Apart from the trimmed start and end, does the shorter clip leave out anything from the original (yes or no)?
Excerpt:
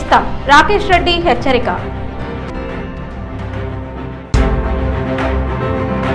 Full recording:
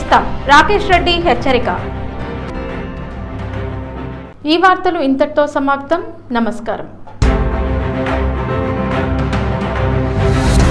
yes